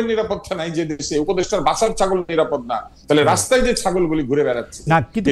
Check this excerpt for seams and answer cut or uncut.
uncut